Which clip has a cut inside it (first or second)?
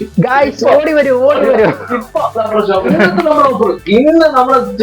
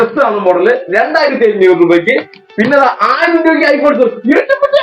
first